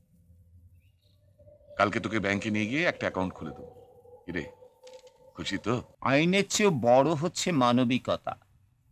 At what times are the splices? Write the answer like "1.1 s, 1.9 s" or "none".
5.9 s